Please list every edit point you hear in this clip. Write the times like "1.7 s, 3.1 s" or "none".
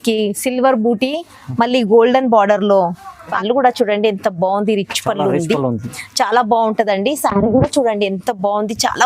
3.3 s